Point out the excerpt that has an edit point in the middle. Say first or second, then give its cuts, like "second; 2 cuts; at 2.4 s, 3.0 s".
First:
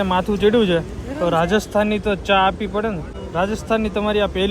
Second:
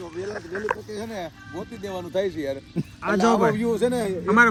first; 1 cut; at 3.1 s